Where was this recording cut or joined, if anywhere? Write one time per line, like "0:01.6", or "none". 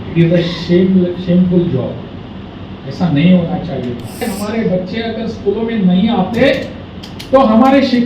0:04.3